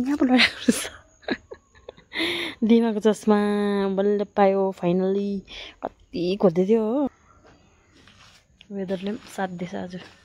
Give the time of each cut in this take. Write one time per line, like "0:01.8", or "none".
0:07.2